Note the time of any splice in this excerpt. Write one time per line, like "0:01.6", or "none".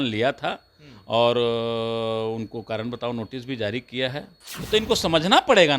0:04.4